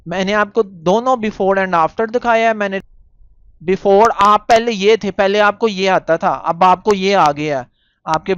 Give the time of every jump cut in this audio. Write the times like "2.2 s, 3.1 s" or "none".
2.9 s